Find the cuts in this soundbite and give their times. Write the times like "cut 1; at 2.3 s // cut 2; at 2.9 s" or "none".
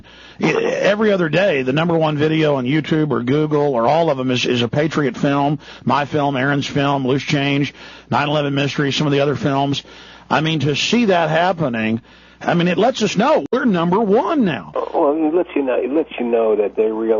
none